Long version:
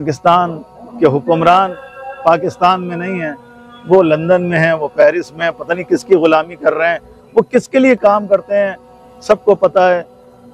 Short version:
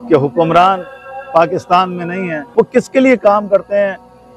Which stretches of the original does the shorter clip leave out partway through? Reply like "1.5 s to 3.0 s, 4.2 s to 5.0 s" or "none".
3.3 s to 7.1 s